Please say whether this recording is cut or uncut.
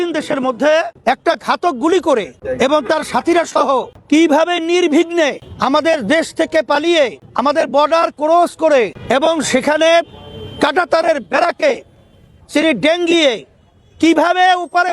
cut